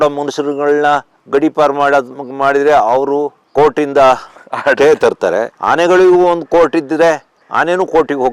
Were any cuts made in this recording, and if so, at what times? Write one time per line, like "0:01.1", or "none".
none